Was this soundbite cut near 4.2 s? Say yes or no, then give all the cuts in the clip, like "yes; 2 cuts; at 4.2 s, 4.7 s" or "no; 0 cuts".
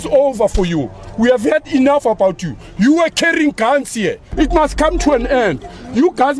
yes; 1 cut; at 4.2 s